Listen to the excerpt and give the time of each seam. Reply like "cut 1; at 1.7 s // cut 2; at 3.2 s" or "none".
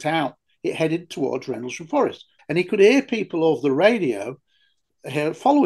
cut 1; at 2.3 s